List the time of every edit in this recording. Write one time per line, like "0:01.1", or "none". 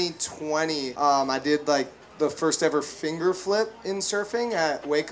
0:00.9